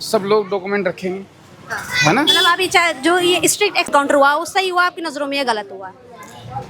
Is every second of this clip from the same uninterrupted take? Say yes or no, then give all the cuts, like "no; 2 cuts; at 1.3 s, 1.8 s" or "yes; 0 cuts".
no; 1 cut; at 3.9 s